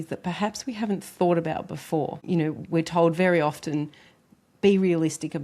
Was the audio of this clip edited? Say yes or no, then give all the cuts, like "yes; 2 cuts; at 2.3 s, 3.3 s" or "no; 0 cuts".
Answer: yes; 1 cut; at 2.2 s